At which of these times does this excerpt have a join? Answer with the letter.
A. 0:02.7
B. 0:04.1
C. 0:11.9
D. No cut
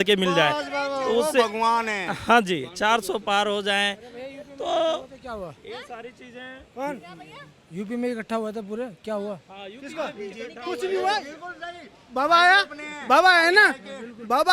D